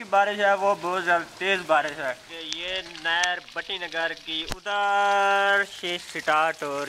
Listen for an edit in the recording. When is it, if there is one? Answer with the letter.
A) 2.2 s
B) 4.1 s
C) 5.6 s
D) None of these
A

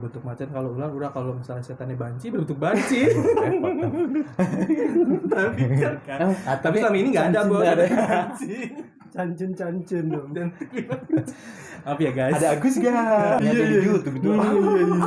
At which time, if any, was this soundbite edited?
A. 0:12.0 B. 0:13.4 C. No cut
B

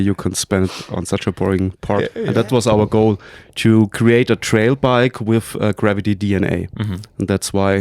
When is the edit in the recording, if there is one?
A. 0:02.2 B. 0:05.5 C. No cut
A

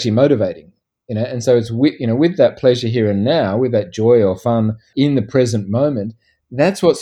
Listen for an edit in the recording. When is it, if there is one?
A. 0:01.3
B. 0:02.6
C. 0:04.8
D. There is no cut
C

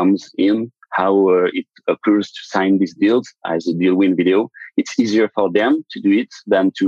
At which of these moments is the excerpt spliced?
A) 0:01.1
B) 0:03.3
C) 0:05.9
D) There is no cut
D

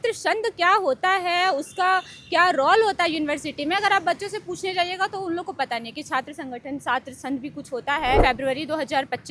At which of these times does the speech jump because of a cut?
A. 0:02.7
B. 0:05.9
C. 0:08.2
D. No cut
C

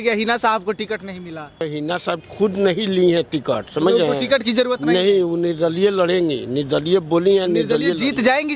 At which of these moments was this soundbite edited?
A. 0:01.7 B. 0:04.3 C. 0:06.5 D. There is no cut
A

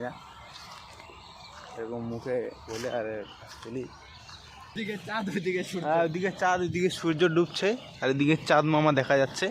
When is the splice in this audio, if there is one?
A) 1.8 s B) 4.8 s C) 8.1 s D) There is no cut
B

